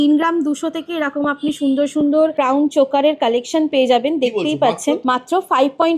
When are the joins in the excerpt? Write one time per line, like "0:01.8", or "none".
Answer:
0:02.3
0:05.0